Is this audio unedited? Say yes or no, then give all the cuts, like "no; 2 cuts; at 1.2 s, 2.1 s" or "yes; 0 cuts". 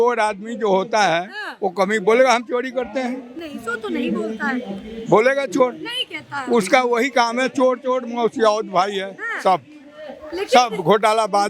yes; 0 cuts